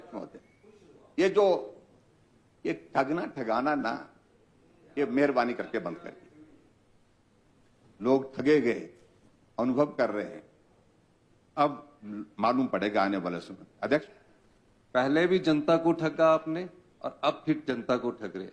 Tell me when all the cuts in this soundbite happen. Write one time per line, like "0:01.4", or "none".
0:14.1